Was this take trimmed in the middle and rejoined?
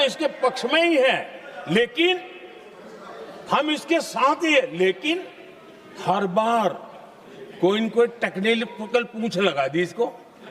no; 0 cuts

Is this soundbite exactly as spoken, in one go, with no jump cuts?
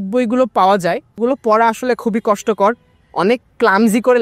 no; 1 cut; at 1.2 s

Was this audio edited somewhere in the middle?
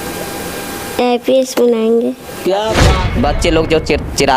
yes; 1 cut; at 3.0 s

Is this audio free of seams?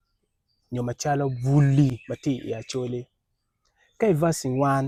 yes; 0 cuts

